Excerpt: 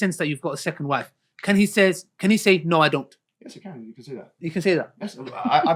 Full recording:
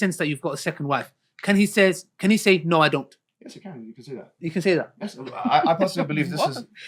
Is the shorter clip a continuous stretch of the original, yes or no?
yes